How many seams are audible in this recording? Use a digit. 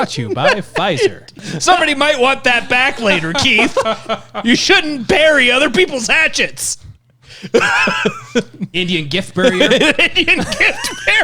1